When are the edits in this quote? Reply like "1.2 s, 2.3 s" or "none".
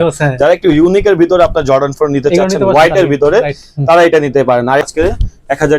4.9 s